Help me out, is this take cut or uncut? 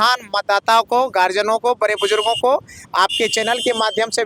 uncut